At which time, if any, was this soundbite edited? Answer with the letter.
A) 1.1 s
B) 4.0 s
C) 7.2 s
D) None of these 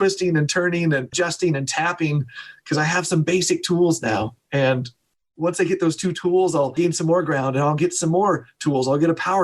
A